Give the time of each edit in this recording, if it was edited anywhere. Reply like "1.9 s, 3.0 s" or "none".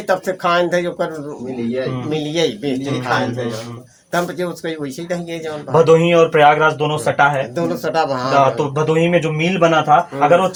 none